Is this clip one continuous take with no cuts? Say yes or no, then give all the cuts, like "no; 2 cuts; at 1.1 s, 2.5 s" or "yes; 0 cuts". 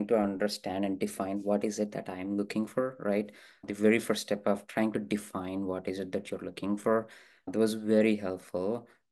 yes; 0 cuts